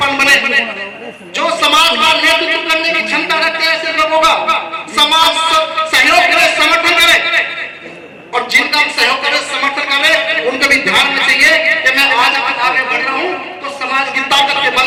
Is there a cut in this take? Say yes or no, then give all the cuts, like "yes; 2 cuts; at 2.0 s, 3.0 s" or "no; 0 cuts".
no; 0 cuts